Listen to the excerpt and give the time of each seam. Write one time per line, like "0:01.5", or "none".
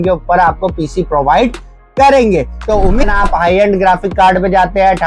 0:03.0